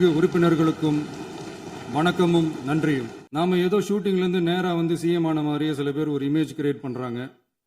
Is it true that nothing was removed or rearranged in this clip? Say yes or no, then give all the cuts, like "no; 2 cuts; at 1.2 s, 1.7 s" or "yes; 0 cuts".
no; 1 cut; at 3.2 s